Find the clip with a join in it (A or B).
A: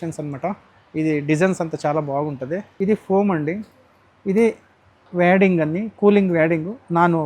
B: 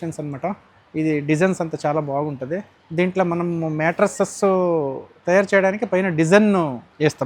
A